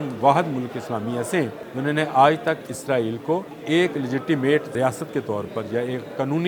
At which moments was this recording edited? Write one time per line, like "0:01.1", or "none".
0:01.6
0:03.5
0:04.7

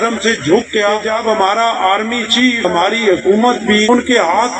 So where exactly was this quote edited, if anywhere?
0:01.1
0:02.6
0:03.9

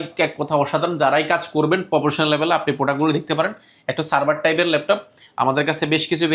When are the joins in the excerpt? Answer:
none

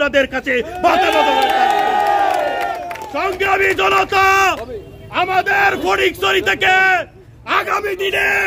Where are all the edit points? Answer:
0:02.9

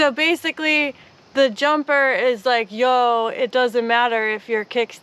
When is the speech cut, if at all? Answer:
none

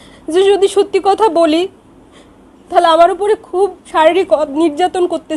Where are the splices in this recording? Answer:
0:03.8

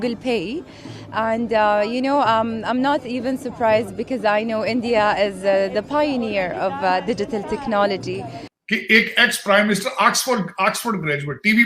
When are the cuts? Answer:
0:08.5

